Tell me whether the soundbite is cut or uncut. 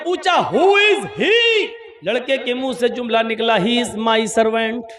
cut